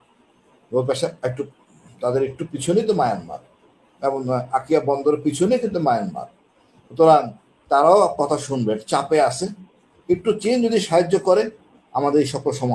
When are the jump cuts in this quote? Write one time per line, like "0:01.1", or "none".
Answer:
none